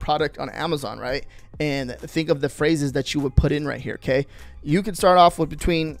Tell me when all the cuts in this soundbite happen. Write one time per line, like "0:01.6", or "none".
none